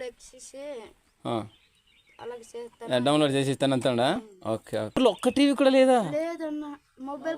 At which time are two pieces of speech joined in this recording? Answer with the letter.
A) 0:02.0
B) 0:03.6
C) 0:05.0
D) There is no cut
C